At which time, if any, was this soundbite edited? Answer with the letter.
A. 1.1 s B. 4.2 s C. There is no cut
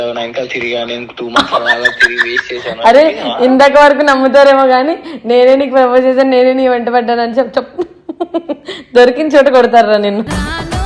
C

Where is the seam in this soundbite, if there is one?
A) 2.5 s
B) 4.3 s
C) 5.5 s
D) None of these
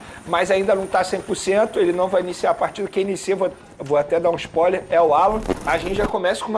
C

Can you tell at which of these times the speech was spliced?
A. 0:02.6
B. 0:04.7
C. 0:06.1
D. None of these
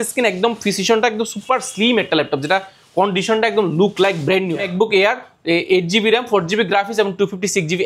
B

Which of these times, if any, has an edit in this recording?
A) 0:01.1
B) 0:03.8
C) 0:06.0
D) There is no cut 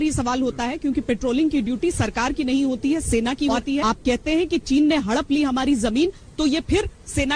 B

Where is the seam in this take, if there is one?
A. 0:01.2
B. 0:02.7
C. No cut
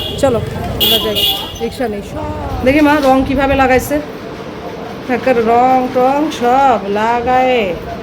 B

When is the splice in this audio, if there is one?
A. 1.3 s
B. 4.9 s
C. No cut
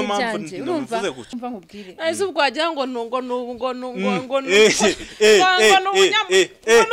A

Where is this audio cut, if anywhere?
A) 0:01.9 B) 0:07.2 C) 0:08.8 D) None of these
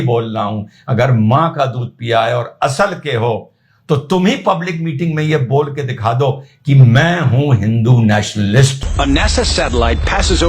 C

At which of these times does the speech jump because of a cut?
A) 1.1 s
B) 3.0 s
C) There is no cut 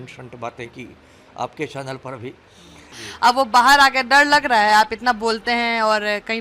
B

